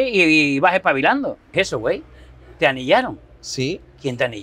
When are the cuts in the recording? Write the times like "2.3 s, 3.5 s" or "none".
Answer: 1.5 s